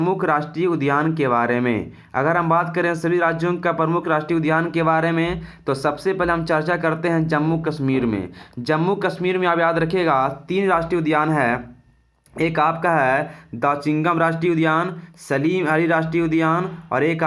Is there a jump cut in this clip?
no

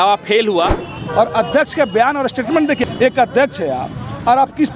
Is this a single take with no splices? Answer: no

